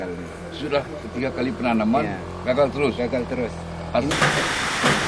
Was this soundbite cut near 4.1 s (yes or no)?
yes